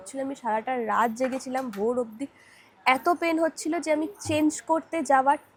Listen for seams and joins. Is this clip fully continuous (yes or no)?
yes